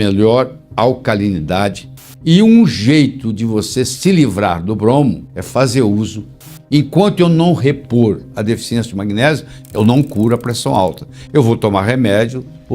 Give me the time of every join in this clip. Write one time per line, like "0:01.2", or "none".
0:02.1
0:06.5